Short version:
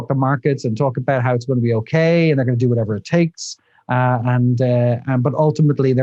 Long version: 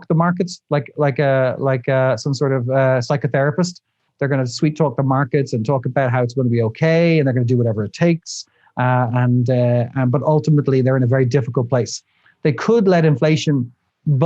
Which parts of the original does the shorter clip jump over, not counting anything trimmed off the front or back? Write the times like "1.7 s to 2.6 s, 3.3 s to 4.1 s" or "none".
none